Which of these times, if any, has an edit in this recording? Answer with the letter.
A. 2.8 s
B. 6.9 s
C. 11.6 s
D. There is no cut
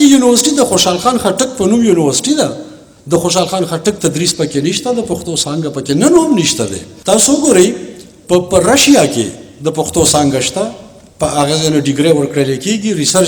B